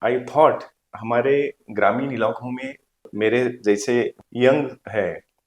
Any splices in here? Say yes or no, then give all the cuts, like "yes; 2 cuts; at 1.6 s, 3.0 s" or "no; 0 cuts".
yes; 3 cuts; at 0.9 s, 3.1 s, 4.2 s